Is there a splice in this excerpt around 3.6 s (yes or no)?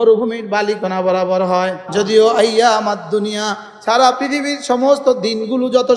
no